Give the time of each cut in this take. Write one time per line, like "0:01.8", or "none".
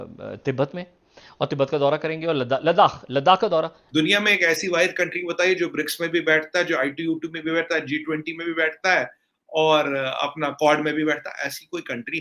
0:03.8